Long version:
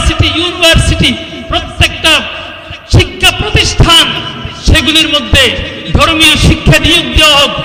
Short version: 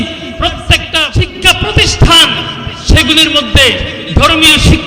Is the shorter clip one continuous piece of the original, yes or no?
no